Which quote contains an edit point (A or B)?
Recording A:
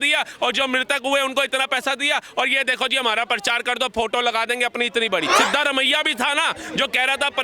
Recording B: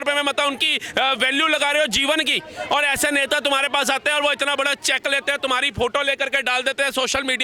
A